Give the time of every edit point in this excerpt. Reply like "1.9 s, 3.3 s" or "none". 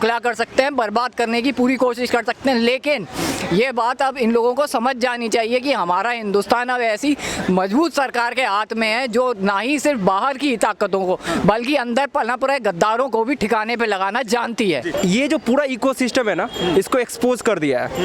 14.9 s